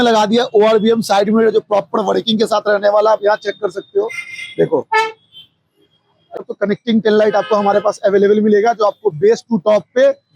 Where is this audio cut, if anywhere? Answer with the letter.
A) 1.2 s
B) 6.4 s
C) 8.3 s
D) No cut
B